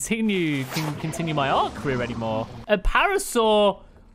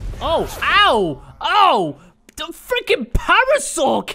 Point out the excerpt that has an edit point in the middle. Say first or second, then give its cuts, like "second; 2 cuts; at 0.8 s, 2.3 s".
first; 1 cut; at 2.6 s